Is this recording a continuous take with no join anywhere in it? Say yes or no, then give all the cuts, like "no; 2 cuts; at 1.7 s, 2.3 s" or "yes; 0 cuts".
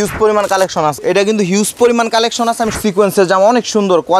no; 2 cuts; at 1.0 s, 2.8 s